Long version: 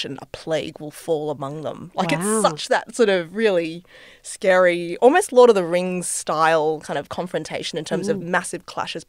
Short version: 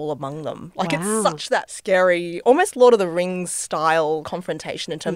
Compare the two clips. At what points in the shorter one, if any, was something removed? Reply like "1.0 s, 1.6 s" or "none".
1.7 s, 4.2 s